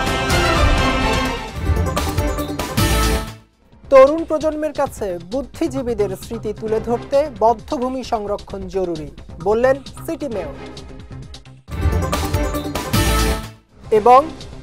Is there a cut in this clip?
yes; 1 cut; at 1.2 s

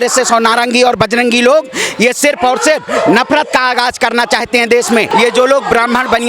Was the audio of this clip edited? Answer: yes; 1 cut; at 5.1 s

